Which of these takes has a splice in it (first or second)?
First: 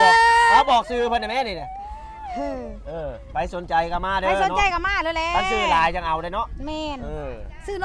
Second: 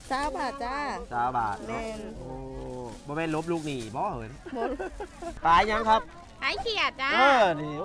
second